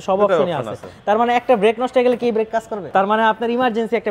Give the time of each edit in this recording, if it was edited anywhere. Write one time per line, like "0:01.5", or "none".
0:02.9